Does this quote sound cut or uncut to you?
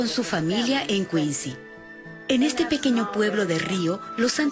uncut